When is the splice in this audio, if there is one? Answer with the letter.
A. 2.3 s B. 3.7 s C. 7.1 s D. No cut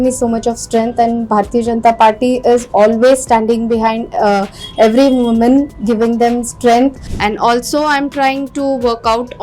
C